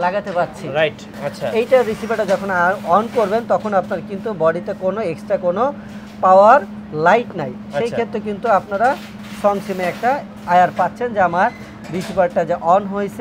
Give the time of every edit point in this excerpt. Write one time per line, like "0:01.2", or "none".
0:01.1